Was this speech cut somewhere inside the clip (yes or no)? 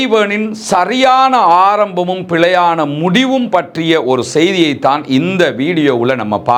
no